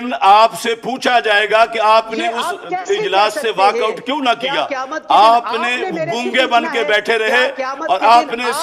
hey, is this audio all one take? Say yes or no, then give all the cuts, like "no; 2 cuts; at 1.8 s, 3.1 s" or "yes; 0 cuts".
yes; 0 cuts